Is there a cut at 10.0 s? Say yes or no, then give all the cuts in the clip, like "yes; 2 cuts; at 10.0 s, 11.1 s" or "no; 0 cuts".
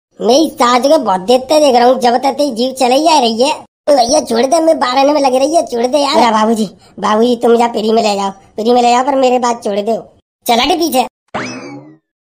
no; 1 cut; at 6.1 s